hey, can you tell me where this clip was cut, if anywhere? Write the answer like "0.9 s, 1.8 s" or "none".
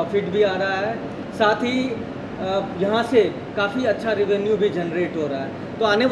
none